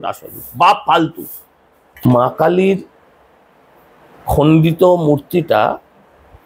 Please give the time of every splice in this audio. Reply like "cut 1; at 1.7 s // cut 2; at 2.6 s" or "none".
cut 1; at 2.0 s